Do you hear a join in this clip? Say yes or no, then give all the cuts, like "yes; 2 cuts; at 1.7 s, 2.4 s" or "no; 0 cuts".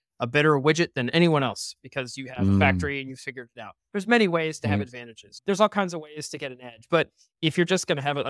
yes; 1 cut; at 5.4 s